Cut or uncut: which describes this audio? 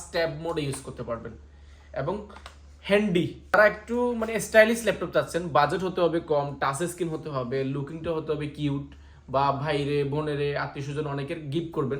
uncut